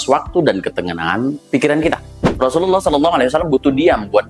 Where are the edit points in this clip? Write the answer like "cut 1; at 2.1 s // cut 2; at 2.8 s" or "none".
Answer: cut 1; at 2.2 s

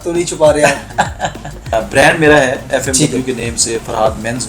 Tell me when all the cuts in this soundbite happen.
cut 1; at 1.7 s

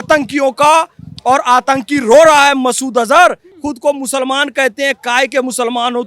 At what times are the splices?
cut 1; at 3.5 s

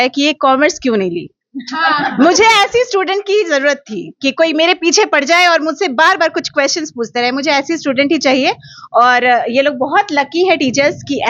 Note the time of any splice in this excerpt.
none

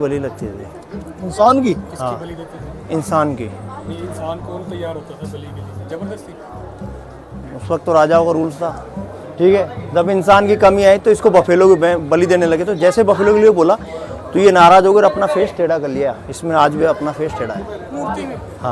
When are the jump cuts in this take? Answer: none

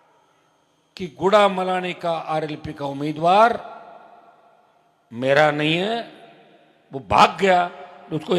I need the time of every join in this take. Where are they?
none

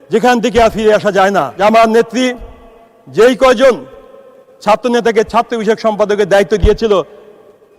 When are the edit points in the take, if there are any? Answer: cut 1; at 1.5 s

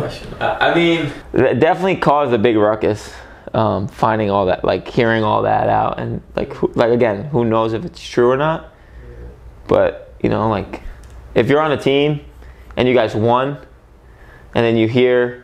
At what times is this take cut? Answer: cut 1; at 1.2 s

